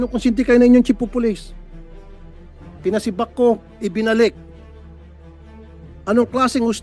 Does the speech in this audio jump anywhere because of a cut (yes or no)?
no